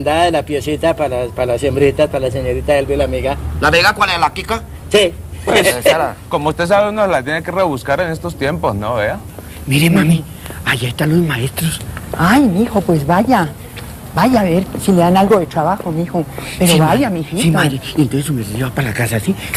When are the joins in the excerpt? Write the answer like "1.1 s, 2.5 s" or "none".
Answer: none

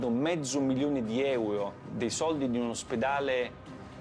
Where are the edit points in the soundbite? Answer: 1.8 s

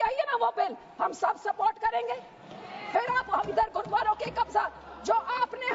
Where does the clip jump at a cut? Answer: none

